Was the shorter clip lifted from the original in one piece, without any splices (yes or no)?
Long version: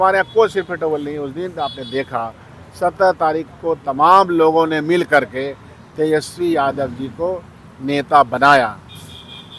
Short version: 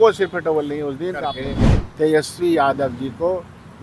no